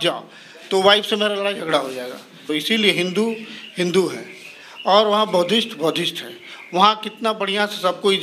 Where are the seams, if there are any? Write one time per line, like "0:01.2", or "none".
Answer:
0:02.4